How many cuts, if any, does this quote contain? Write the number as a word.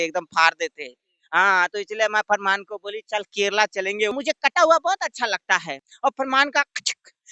two